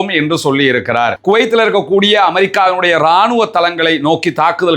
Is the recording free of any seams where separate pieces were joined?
no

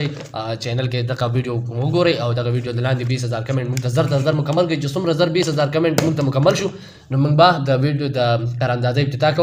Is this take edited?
no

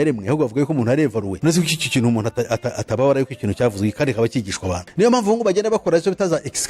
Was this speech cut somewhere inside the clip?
yes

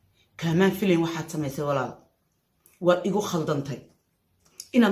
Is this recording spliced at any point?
no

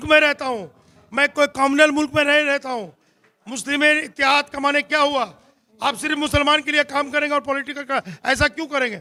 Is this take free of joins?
yes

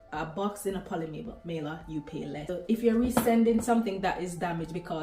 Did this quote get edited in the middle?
yes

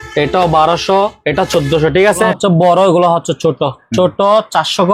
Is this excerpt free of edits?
no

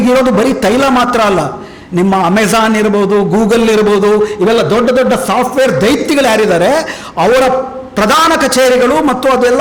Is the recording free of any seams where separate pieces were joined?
yes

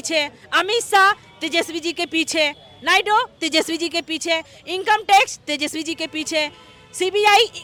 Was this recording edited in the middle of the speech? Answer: no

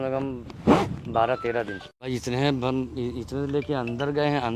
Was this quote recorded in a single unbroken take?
no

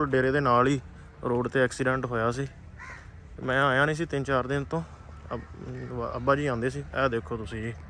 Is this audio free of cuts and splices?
yes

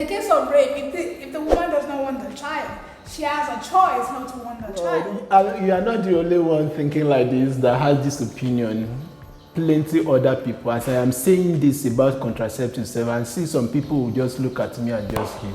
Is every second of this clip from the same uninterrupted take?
no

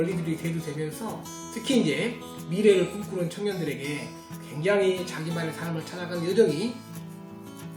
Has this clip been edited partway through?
no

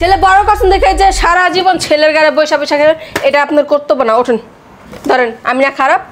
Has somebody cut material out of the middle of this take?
no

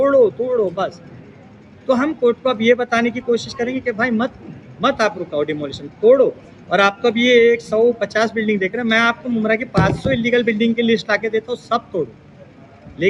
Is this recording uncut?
yes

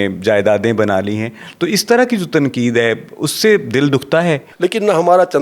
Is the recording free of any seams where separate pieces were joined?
no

